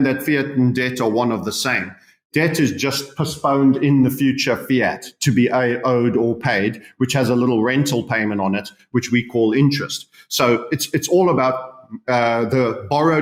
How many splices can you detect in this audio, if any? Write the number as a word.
zero